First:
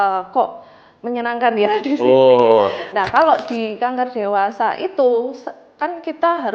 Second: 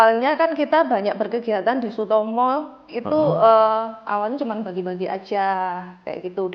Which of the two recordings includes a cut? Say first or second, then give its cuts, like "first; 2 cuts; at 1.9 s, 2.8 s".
first; 1 cut; at 2.9 s